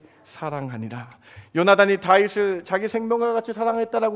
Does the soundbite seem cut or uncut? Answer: uncut